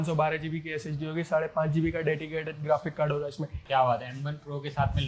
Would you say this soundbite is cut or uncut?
cut